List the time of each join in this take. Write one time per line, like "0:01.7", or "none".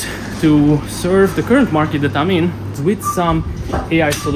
0:02.8